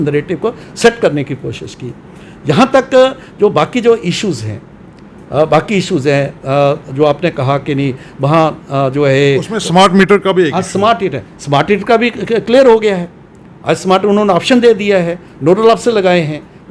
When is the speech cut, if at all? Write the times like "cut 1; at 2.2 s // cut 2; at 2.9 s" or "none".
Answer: none

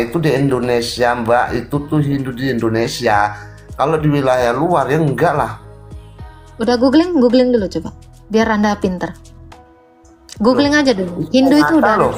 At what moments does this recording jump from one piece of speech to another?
none

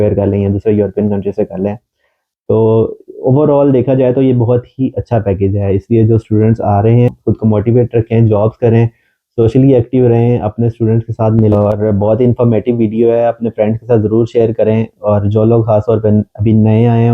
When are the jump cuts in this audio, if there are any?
cut 1; at 7.1 s // cut 2; at 11.5 s

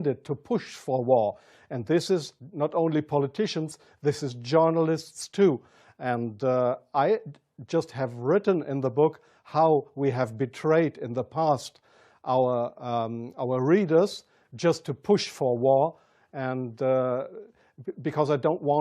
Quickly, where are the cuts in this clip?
cut 1; at 16.8 s

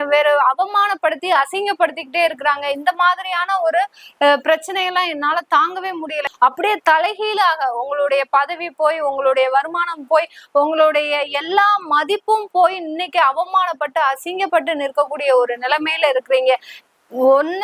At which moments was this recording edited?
cut 1; at 6.2 s // cut 2; at 16.7 s

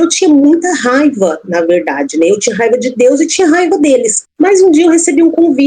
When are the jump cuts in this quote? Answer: cut 1; at 4.2 s

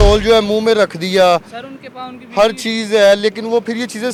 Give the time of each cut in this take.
none

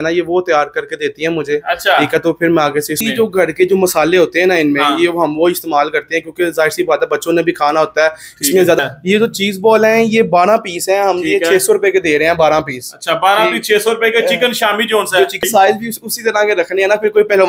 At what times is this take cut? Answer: cut 1; at 3.0 s // cut 2; at 8.8 s // cut 3; at 15.4 s

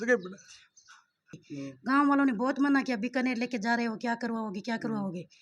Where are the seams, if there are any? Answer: cut 1; at 1.4 s

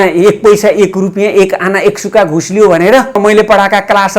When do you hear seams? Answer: cut 1; at 3.2 s

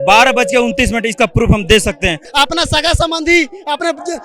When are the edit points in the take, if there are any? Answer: cut 1; at 2.2 s

